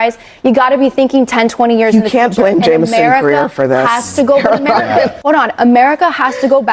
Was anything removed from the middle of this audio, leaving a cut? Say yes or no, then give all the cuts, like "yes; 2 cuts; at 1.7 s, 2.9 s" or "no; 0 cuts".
yes; 1 cut; at 5.1 s